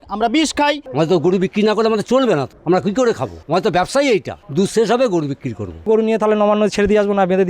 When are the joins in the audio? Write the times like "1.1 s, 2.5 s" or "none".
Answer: 0.8 s, 2.5 s, 3.3 s, 4.4 s, 5.9 s